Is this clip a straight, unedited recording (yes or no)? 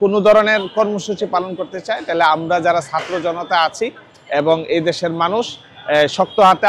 yes